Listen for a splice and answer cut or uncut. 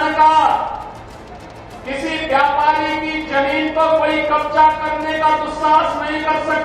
uncut